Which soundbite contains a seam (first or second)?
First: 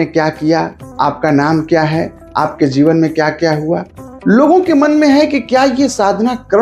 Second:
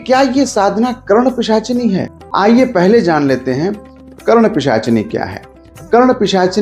second